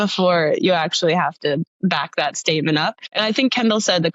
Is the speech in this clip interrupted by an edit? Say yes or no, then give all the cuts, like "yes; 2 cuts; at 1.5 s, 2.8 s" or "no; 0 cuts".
yes; 2 cuts; at 1.7 s, 3.0 s